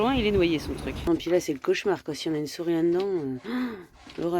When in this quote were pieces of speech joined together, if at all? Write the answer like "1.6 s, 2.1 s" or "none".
1.0 s